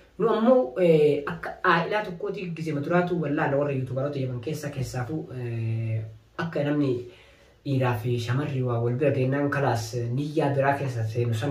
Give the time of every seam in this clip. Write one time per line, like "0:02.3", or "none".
none